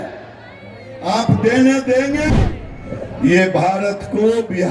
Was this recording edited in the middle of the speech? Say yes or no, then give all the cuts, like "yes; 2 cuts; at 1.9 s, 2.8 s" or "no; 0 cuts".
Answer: yes; 1 cut; at 2.3 s